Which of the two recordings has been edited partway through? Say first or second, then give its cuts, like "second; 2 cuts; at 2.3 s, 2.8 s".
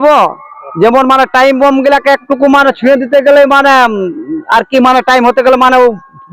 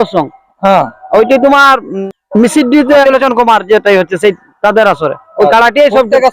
second; 2 cuts; at 1.9 s, 3.0 s